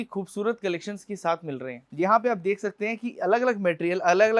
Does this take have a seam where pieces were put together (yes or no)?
yes